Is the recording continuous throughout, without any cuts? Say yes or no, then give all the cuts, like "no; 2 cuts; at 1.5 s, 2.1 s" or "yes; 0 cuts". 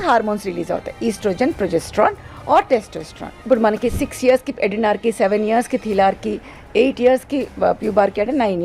no; 1 cut; at 3.4 s